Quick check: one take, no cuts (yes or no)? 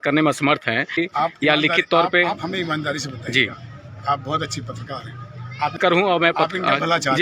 no